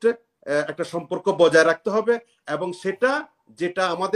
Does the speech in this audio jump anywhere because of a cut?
no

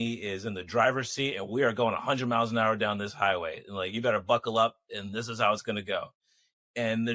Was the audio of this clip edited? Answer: no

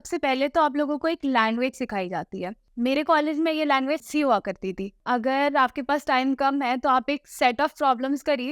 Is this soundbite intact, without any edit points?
no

